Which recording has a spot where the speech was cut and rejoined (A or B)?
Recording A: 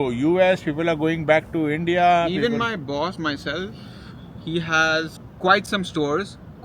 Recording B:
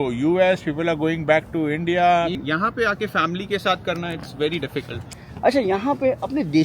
B